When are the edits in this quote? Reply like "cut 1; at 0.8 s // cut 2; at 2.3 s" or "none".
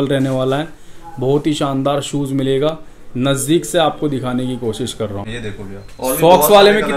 cut 1; at 5.4 s